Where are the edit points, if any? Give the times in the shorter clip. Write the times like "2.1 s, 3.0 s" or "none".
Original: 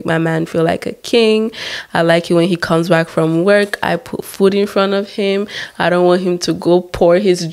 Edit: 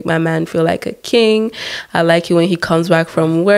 none

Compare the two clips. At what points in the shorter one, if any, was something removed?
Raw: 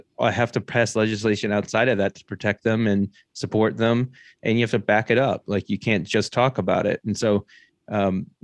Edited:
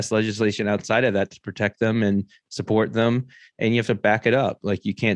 none

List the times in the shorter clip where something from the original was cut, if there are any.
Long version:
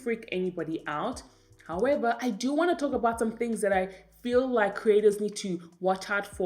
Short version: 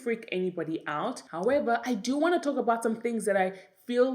1.2 s

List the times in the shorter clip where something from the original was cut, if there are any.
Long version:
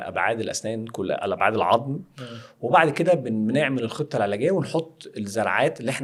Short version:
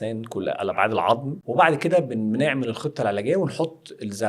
1.4 s

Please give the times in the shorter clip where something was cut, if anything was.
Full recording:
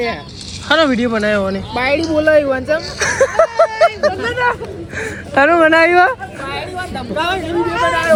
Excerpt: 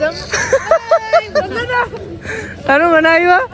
none

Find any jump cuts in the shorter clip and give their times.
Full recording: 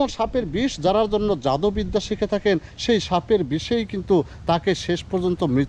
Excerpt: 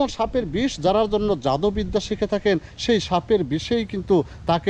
none

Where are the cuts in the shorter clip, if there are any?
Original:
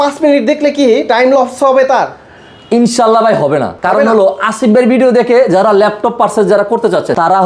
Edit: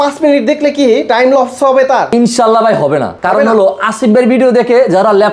2.1 s

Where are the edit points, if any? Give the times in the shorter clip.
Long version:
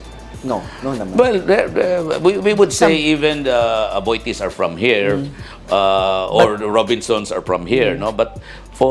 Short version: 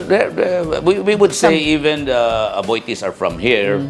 none

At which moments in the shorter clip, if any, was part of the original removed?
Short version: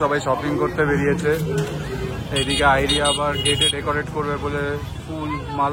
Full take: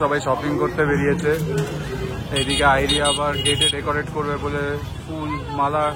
none

